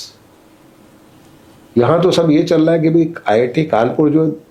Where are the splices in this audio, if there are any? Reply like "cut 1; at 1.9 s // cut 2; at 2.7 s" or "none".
none